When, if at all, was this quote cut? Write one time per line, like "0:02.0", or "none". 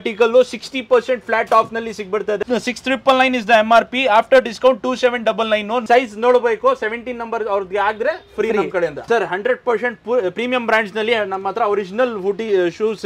0:02.4
0:05.8
0:09.1